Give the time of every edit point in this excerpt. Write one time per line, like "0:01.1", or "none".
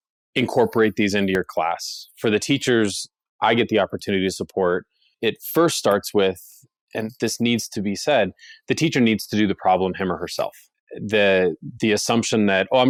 none